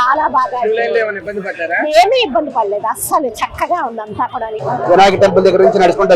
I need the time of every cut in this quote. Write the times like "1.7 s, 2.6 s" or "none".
4.6 s